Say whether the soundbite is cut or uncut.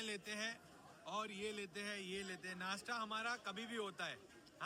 uncut